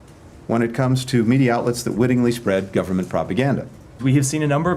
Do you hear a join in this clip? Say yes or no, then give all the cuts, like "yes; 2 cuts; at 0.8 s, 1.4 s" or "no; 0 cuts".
yes; 1 cut; at 3.8 s